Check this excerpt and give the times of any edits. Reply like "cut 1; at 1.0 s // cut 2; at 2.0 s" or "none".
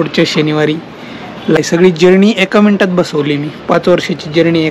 cut 1; at 1.6 s